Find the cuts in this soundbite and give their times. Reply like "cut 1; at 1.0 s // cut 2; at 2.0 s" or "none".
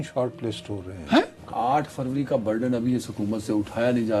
cut 1; at 1.4 s